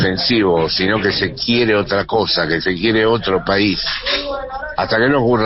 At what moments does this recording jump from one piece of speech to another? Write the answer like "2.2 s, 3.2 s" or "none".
none